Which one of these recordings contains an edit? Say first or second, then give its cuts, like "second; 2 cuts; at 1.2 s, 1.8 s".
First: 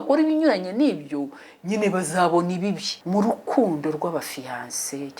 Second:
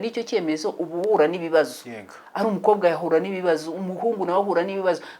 first; 1 cut; at 2.9 s